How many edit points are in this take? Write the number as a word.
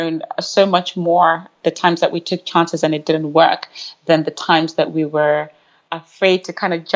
one